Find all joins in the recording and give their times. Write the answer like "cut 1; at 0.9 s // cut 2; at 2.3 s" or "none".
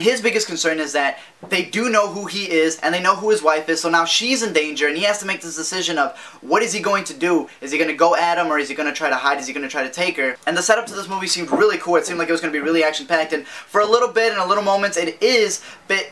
cut 1; at 13.6 s